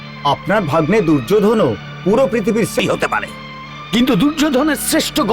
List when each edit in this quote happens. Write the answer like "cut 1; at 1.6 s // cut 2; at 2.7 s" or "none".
cut 1; at 2.8 s

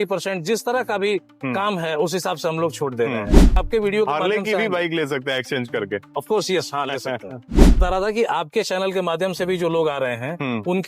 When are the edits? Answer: cut 1; at 3.6 s // cut 2; at 7.8 s

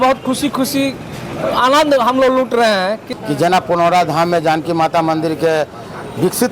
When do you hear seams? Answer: cut 1; at 3.1 s

